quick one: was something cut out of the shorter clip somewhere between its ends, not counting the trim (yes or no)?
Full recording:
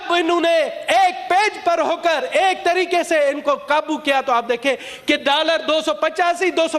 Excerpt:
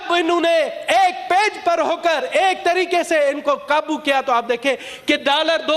no